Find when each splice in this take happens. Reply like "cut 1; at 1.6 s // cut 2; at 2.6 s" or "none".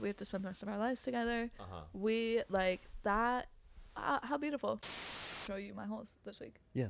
cut 1; at 5.1 s

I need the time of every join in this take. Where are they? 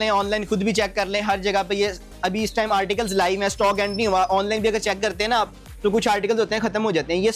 none

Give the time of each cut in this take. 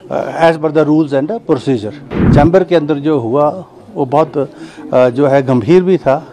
cut 1; at 2.0 s

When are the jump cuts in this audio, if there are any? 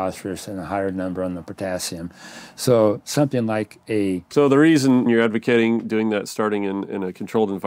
cut 1; at 4.2 s // cut 2; at 5.1 s

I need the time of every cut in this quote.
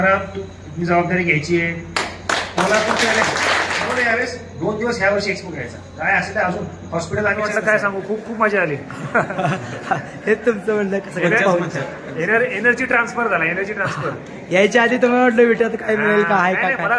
cut 1; at 3.8 s // cut 2; at 7.5 s

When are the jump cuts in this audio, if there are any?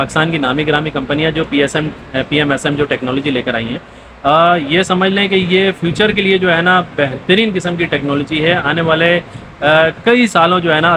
none

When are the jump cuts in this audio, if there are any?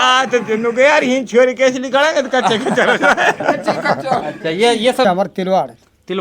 cut 1; at 5.0 s

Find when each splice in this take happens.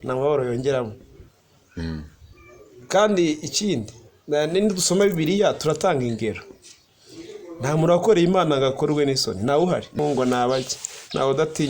cut 1; at 10.0 s

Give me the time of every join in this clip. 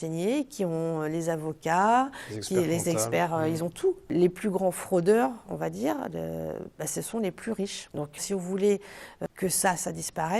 cut 1; at 4.1 s // cut 2; at 7.8 s

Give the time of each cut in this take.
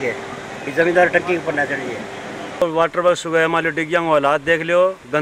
cut 1; at 2.6 s

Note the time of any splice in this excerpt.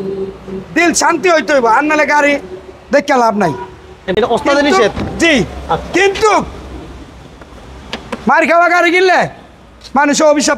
cut 1; at 4.0 s

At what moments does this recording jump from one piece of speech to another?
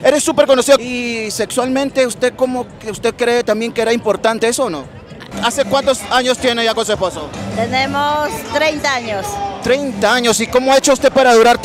cut 1; at 0.9 s // cut 2; at 5.2 s

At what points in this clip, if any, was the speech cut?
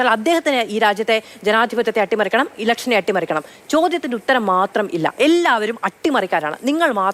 none

